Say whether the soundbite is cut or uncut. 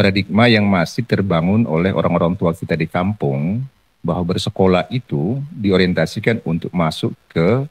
uncut